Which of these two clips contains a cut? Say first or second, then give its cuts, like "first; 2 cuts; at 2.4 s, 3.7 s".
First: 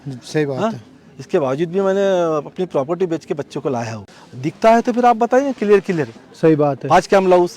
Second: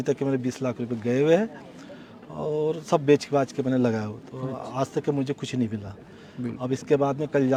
first; 1 cut; at 4.0 s